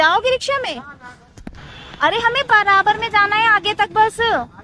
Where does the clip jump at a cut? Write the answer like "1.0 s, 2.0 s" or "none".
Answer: none